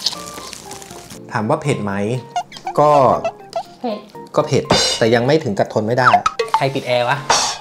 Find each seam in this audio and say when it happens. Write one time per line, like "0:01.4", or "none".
0:06.6